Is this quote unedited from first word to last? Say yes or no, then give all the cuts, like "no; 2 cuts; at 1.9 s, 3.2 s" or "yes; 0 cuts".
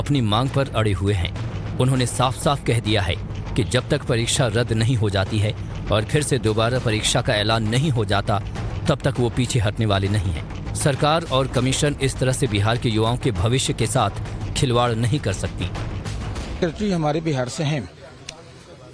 yes; 0 cuts